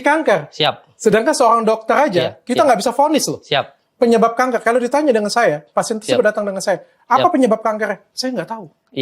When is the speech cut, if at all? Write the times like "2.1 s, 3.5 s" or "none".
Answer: none

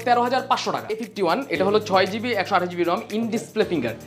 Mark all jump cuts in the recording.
1.1 s

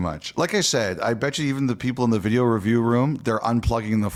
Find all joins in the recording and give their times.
none

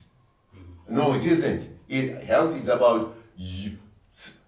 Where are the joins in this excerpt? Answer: none

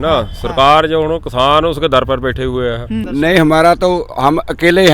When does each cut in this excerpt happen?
3.0 s

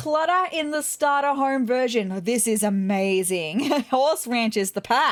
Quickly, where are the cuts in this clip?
none

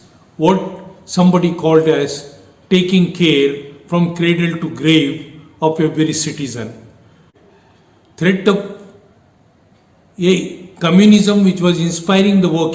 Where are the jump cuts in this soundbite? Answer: 7.2 s

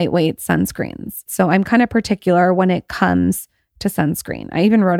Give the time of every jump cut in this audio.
1.2 s

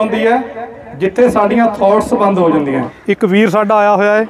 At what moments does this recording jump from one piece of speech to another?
2.9 s

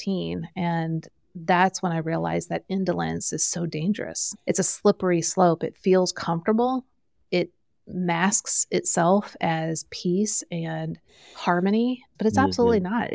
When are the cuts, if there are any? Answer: 4.4 s, 12.1 s

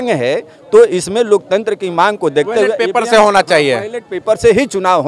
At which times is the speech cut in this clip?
none

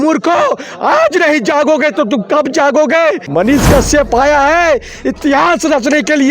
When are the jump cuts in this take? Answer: 3.2 s

